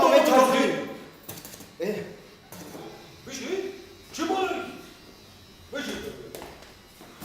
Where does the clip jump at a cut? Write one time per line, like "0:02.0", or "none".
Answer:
0:02.9